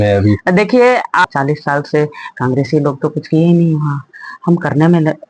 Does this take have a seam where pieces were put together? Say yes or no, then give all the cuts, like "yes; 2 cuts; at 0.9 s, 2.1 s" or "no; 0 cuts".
yes; 1 cut; at 1.2 s